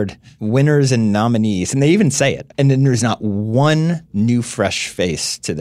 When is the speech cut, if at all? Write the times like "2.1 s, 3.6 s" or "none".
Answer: 2.4 s, 4.0 s